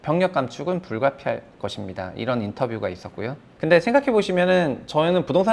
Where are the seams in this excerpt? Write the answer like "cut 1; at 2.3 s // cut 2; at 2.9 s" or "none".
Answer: cut 1; at 3.4 s